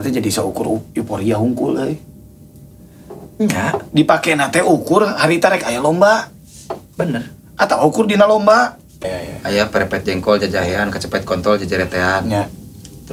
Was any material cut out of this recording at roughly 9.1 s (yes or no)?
yes